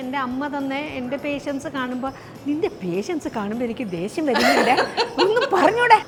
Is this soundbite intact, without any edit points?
yes; 0 cuts

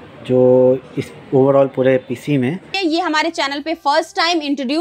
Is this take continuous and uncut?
no; 1 cut; at 2.7 s

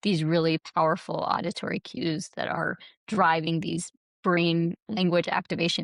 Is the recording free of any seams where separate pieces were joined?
yes; 0 cuts

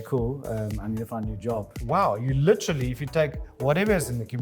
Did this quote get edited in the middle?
yes; 1 cut; at 1.8 s

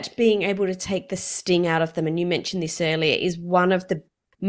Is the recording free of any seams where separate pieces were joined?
yes; 0 cuts

